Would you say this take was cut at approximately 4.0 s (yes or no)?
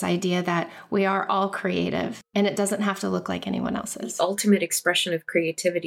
yes